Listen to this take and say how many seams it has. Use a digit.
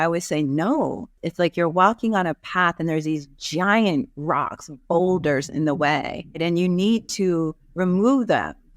2